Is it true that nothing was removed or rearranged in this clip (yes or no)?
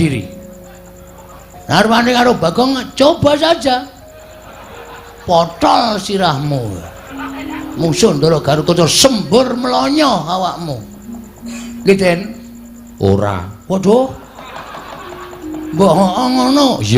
yes